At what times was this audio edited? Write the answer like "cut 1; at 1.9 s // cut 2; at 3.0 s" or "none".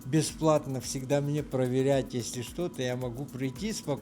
none

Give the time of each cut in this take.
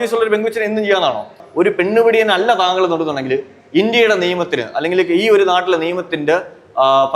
cut 1; at 1.4 s

